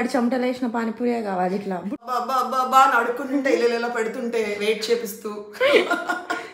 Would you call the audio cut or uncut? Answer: cut